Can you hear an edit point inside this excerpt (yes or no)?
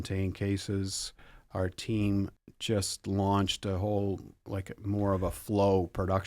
yes